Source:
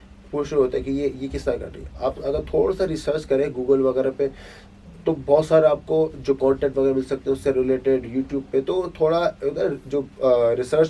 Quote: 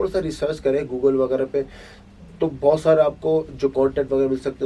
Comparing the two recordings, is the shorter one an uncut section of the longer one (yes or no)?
yes